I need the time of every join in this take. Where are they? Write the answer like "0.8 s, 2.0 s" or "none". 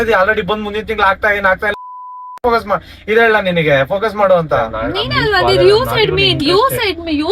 4.7 s